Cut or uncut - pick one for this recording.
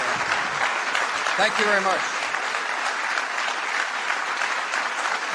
uncut